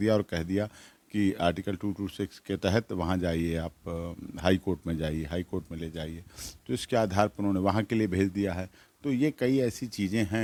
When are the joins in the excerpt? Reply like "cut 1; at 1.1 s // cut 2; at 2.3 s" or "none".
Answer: none